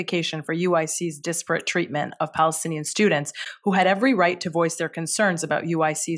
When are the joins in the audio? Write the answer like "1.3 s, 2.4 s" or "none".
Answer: none

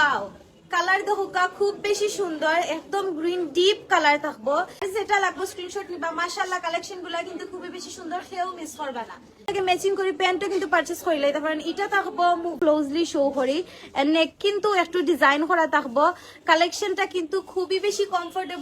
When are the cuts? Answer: 4.8 s, 9.5 s, 12.6 s

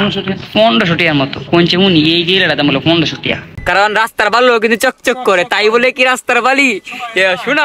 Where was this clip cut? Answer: 3.6 s

